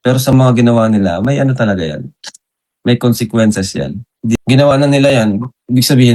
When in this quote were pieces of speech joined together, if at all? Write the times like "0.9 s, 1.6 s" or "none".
4.4 s